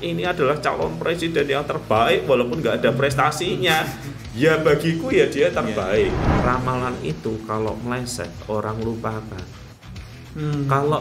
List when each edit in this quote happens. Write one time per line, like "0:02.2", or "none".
0:06.3